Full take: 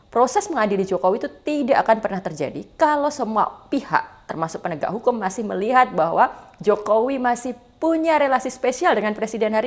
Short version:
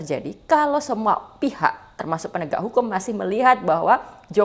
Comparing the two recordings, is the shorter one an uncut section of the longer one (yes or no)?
yes